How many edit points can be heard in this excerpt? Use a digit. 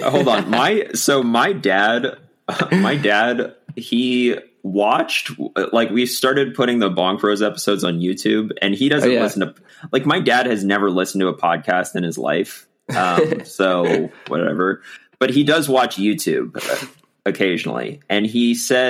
0